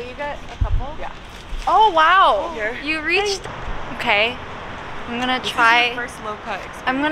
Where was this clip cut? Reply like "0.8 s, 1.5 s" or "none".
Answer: 3.4 s